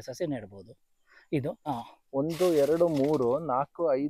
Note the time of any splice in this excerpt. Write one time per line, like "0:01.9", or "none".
0:01.6

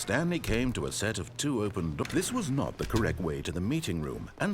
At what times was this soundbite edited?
0:02.0

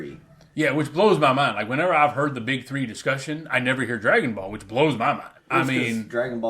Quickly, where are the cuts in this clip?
0:05.3

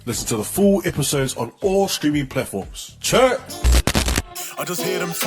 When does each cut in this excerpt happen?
0:04.3

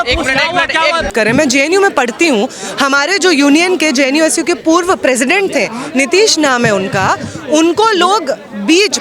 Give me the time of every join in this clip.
0:01.1

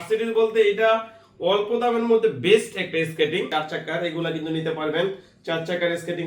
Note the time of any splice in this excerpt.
0:03.5

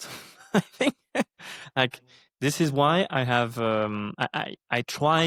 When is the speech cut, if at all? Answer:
none

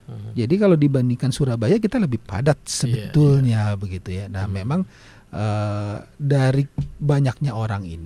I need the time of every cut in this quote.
none

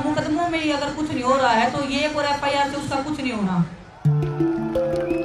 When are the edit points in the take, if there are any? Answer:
0:04.2

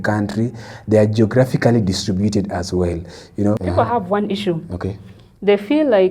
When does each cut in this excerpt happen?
0:03.6

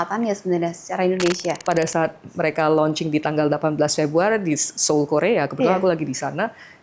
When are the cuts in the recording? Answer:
0:01.6

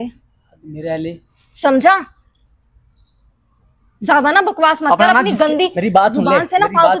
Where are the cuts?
none

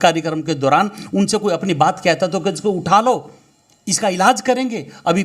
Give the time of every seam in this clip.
none

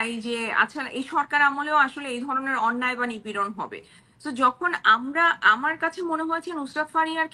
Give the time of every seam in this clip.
none

